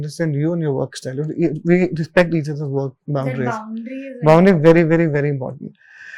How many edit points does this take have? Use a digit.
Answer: 0